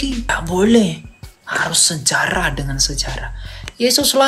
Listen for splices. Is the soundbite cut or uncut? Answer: uncut